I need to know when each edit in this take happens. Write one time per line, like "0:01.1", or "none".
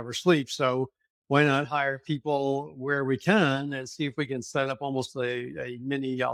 none

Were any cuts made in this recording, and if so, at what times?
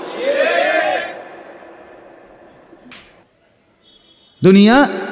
0:03.4

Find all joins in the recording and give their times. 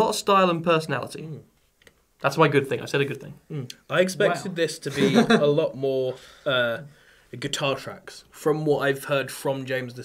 none

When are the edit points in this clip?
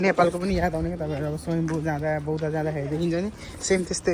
none

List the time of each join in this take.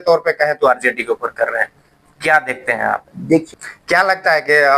0:03.5

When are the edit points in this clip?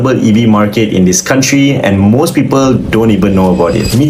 none

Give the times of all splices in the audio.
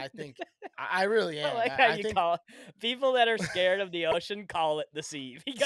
none

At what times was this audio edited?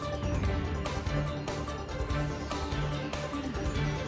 0:02.4

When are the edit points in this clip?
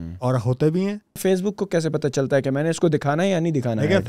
0:01.2

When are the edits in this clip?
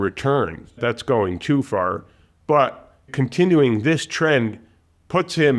0:00.8
0:03.1

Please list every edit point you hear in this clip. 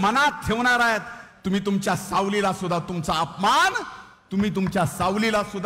none

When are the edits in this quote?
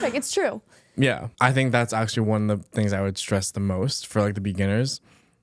0:01.3

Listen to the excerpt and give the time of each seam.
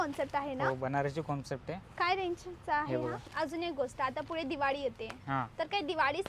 0:03.2

